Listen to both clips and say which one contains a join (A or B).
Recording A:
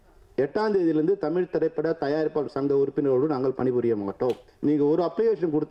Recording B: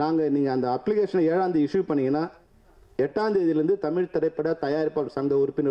A